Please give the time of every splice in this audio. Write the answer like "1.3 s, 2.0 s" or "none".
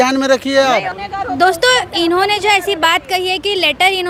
none